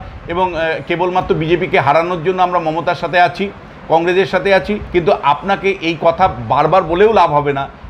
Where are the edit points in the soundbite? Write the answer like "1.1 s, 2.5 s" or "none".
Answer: 4.8 s